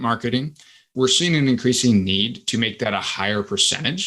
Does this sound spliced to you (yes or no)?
yes